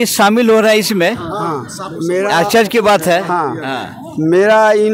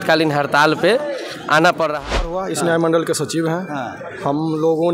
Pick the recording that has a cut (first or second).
second